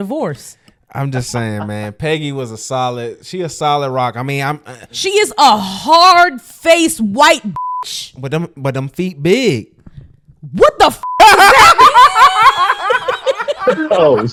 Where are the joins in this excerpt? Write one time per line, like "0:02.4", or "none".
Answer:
none